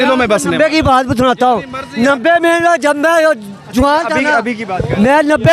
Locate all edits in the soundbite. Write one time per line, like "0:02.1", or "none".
none